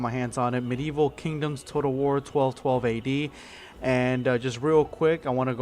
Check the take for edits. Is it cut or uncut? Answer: cut